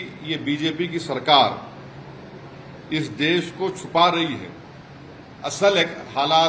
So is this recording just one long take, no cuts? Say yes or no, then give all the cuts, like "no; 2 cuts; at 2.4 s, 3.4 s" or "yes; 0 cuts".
yes; 0 cuts